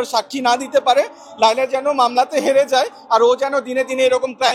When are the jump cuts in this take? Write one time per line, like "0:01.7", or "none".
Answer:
none